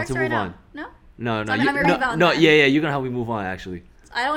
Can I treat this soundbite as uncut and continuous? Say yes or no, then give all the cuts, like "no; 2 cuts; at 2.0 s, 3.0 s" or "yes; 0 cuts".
yes; 0 cuts